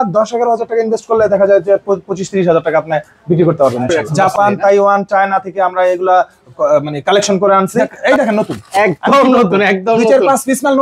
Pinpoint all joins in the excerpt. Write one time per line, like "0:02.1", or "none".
0:04.0
0:07.9